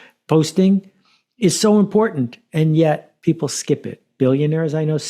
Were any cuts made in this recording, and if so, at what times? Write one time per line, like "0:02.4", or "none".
0:03.1